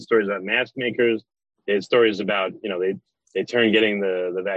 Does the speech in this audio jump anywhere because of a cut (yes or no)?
no